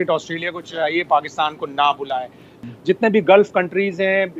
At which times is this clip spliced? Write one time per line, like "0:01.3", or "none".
0:02.6